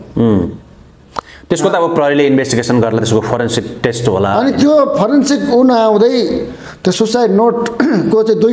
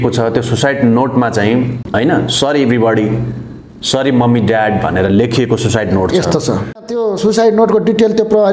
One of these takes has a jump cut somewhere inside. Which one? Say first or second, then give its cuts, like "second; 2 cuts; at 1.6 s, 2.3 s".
second; 2 cuts; at 1.8 s, 6.9 s